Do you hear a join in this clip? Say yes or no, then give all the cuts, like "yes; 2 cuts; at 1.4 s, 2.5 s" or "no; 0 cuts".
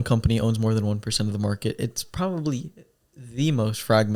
no; 0 cuts